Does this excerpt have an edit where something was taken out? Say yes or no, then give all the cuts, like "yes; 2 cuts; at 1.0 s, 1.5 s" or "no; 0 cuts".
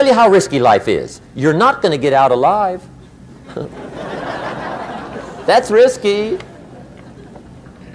no; 0 cuts